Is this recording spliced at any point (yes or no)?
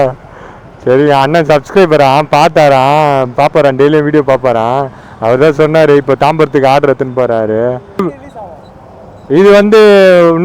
yes